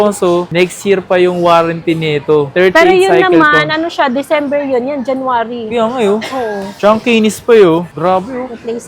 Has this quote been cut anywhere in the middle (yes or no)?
yes